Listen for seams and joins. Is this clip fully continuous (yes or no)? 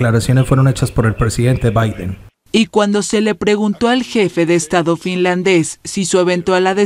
no